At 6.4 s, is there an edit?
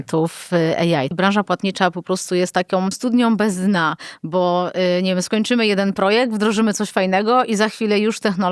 no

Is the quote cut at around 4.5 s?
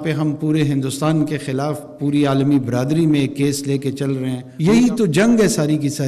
yes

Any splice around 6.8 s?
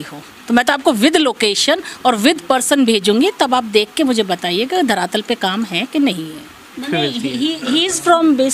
yes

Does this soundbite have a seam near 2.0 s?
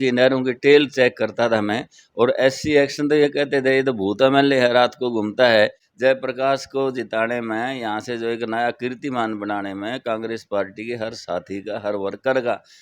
no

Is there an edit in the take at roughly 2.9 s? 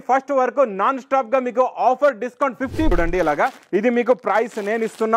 yes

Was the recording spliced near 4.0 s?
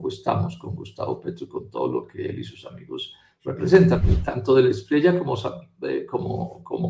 yes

